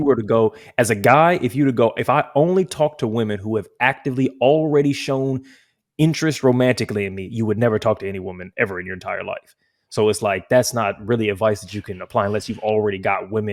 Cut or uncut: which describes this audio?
uncut